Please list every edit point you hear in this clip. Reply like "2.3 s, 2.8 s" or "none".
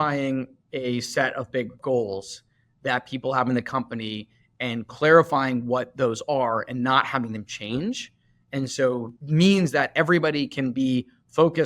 1.8 s

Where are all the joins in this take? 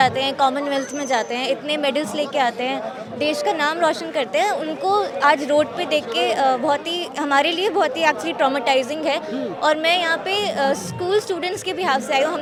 none

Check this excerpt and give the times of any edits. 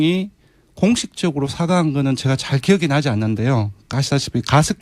3.4 s

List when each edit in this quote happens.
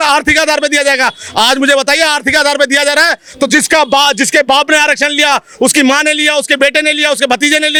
none

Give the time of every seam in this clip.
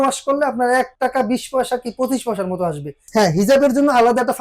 0.9 s, 2.9 s

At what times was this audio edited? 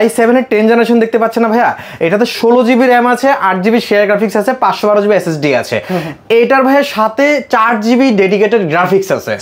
none

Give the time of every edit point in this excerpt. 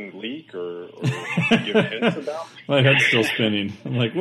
none

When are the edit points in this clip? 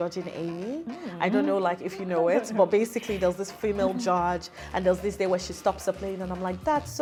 none

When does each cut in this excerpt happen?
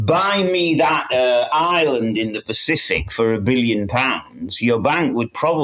none

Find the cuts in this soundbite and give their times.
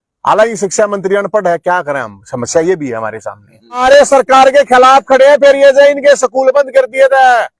3.8 s

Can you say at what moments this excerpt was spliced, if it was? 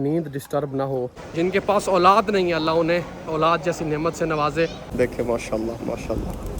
1.2 s, 4.8 s

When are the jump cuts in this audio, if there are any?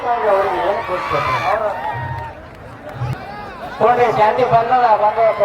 3.1 s

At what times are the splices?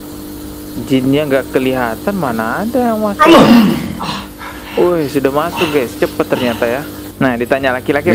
7.0 s

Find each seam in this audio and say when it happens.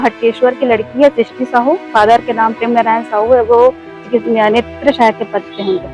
1.8 s

